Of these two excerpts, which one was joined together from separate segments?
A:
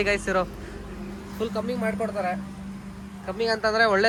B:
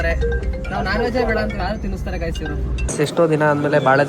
B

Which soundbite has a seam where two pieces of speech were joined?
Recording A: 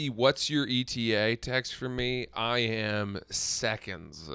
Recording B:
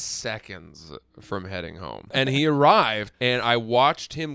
B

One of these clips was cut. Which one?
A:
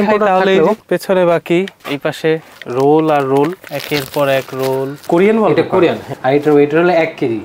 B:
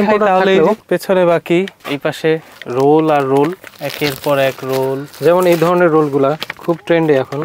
A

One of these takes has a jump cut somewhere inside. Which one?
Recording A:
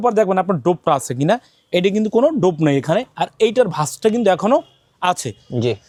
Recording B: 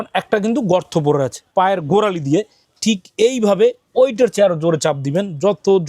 B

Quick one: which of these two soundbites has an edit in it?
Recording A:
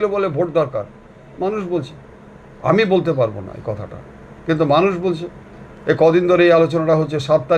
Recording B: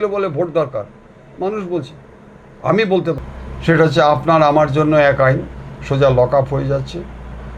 B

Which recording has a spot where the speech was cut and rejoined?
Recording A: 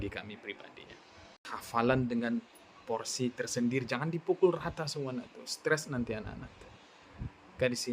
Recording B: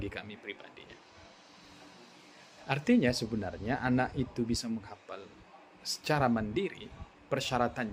A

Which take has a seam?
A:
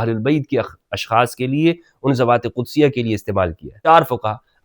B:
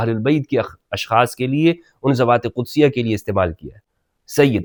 A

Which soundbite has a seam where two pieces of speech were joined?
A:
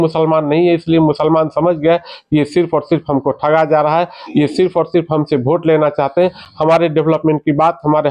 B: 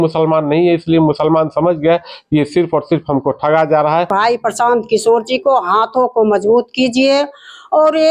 B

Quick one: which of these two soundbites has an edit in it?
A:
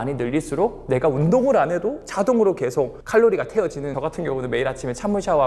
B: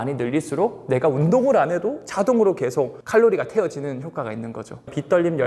A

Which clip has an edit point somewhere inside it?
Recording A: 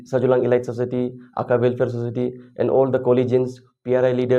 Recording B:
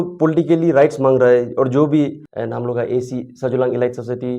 B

